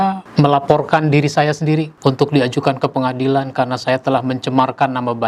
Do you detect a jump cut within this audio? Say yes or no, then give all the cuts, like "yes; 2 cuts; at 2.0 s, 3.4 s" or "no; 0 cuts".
no; 0 cuts